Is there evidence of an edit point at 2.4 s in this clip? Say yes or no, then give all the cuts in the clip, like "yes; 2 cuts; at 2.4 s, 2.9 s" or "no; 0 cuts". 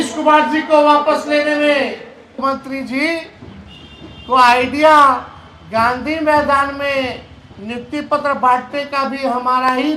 yes; 1 cut; at 2.4 s